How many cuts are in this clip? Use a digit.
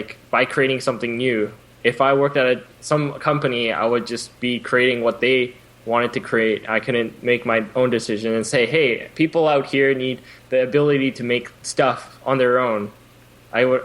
2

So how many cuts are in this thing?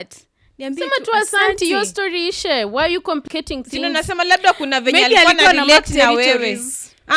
1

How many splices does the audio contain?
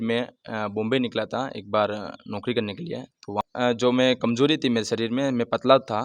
1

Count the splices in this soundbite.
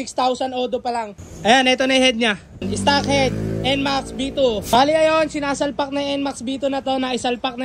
3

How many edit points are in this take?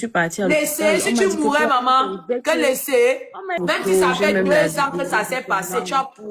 1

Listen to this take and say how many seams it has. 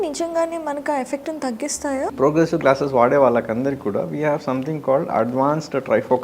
1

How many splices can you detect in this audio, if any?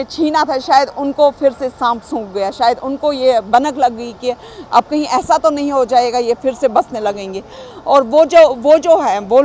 0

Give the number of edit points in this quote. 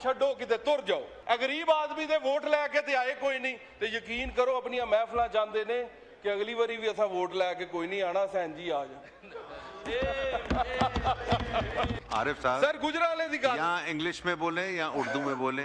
2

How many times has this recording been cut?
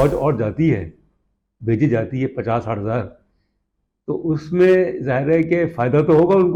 0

